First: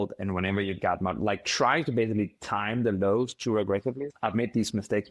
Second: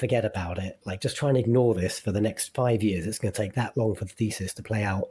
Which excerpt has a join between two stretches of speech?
first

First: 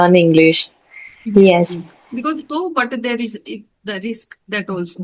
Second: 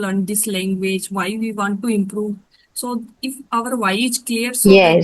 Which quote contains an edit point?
first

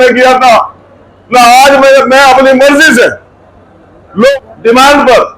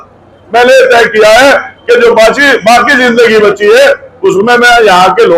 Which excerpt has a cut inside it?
first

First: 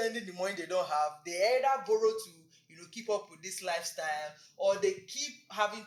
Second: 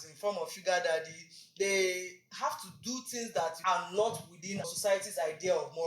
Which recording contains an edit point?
second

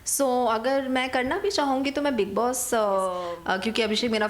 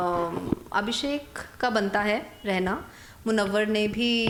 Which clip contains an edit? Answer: first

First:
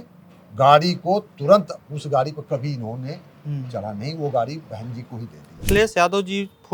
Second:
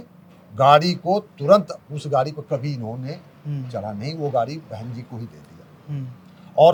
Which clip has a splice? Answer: first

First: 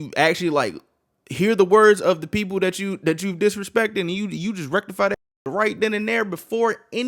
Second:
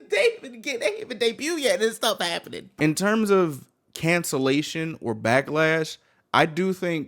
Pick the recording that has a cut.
second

